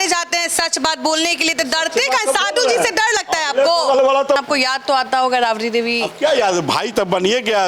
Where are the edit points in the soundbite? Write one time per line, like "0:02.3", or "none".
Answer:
0:04.4